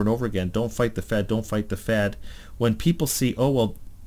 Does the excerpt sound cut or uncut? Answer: uncut